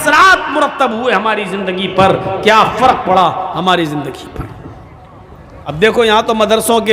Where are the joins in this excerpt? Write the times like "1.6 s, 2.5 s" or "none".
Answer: 5.7 s